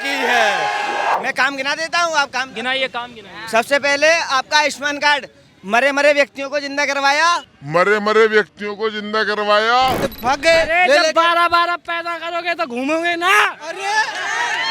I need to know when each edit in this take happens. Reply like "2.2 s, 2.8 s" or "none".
1.2 s, 10.0 s